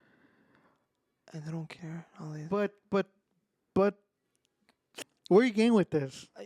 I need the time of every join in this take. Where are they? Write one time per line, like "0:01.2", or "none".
0:05.0